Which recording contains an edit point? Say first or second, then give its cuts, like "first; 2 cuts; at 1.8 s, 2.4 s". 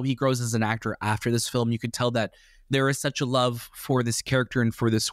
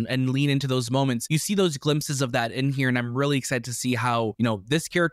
second; 2 cuts; at 1.2 s, 4.3 s